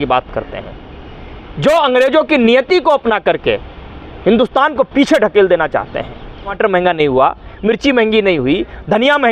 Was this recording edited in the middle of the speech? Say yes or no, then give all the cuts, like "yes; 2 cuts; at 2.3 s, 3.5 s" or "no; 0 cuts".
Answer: yes; 1 cut; at 6.5 s